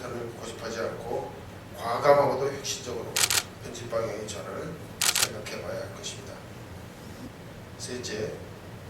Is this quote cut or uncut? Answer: cut